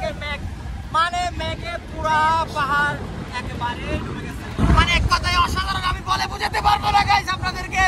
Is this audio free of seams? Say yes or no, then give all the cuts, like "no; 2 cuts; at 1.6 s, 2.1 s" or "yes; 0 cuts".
no; 1 cut; at 4.6 s